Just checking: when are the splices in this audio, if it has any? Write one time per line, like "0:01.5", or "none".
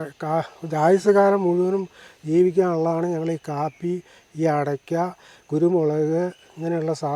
none